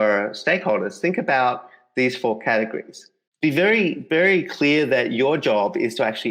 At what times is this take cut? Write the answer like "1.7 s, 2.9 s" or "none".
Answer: 3.2 s